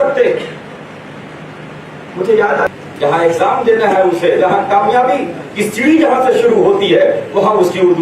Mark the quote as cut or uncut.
cut